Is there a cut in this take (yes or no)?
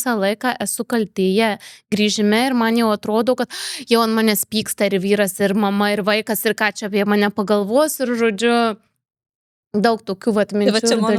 no